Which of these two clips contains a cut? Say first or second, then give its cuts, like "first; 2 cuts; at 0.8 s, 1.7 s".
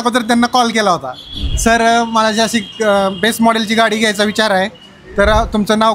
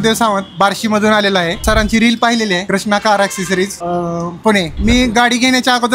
second; 4 cuts; at 1.6 s, 2.6 s, 3.8 s, 4.7 s